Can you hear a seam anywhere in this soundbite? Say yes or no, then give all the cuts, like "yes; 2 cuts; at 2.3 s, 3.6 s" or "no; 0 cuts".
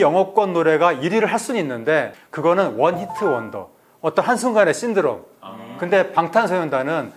yes; 1 cut; at 2.1 s